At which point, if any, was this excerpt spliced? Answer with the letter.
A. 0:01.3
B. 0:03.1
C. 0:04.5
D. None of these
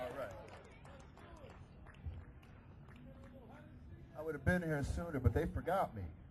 A